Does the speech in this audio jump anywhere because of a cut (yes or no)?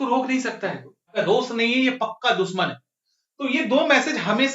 yes